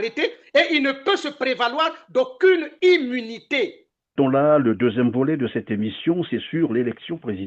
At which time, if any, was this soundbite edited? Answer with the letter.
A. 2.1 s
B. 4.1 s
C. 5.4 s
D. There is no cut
B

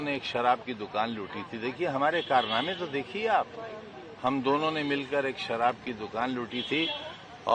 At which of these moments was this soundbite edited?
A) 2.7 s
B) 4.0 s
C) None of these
C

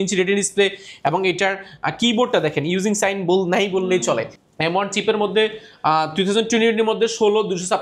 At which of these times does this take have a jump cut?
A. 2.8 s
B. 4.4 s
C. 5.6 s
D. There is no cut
B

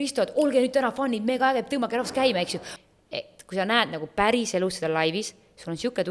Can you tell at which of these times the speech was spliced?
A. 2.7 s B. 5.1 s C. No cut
A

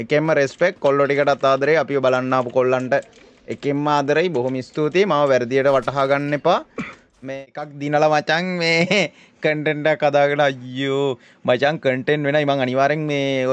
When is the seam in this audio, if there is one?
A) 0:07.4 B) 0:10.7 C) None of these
A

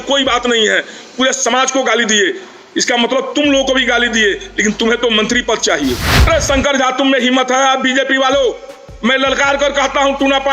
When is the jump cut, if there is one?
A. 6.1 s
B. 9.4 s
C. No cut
A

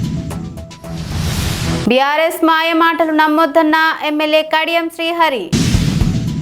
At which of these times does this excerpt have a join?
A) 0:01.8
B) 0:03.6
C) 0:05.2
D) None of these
A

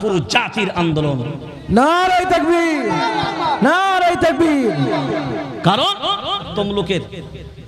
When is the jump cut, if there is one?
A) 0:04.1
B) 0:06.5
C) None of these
B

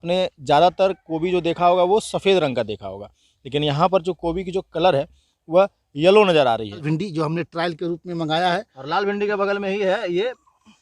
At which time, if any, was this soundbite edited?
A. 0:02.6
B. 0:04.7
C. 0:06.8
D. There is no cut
C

